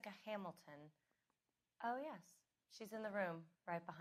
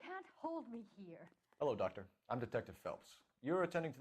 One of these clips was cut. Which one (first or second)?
second